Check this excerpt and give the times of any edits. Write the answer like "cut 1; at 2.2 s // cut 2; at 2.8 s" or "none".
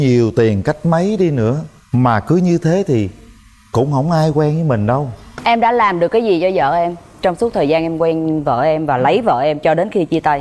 cut 1; at 5.3 s